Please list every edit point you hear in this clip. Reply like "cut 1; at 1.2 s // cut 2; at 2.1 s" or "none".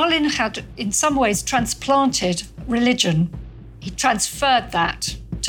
cut 1; at 3.5 s